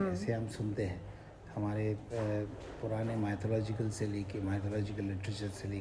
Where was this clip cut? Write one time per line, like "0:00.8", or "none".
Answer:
none